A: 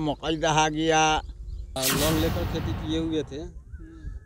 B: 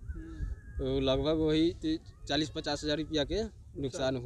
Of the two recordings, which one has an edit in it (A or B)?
A